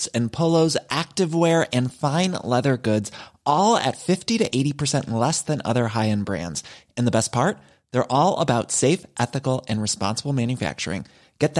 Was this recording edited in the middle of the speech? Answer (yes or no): no